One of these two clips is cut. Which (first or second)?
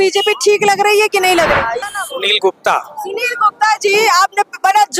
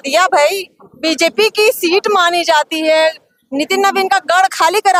first